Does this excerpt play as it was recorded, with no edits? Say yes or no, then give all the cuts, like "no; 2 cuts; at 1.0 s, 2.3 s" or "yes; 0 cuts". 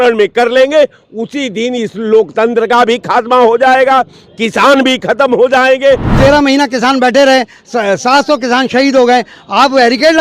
no; 1 cut; at 6.1 s